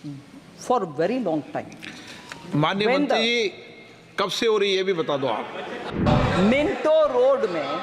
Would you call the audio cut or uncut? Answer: cut